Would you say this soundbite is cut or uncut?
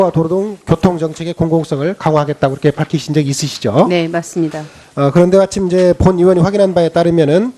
uncut